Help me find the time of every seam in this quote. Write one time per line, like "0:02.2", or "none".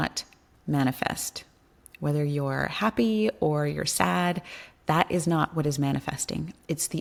none